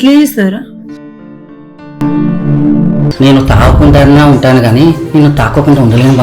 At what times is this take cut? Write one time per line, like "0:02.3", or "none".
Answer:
0:02.5